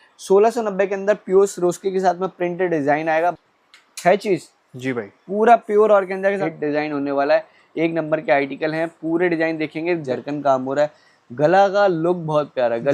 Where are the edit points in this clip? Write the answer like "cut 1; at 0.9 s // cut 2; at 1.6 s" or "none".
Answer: cut 1; at 3.3 s // cut 2; at 6.4 s // cut 3; at 10.0 s